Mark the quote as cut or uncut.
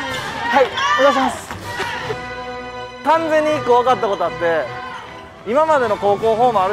cut